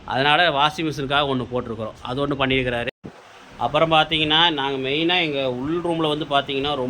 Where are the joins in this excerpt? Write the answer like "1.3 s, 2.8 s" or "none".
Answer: 3.0 s